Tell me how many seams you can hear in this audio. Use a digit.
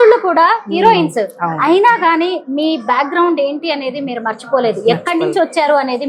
0